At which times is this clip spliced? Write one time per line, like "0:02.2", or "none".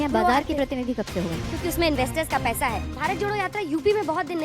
0:01.5
0:02.9